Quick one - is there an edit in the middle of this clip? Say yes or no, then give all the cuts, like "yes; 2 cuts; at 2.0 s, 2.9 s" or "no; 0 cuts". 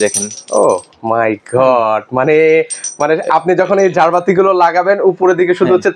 no; 0 cuts